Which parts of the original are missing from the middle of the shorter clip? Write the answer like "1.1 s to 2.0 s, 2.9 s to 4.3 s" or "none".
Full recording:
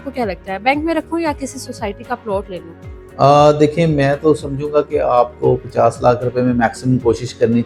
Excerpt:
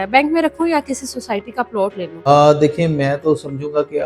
2.8 s to 3.3 s